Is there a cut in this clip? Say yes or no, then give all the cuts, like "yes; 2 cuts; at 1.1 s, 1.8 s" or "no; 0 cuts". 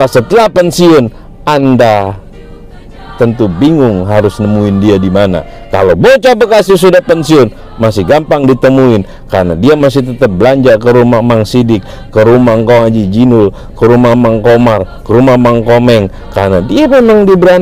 no; 0 cuts